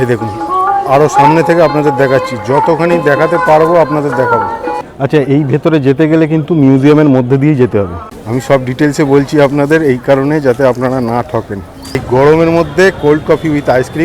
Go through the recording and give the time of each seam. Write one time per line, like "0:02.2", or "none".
0:04.8
0:08.0
0:12.0